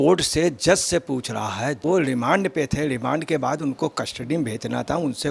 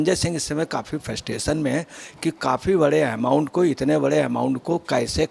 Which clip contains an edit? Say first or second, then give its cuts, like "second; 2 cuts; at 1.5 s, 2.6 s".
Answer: first; 1 cut; at 1.8 s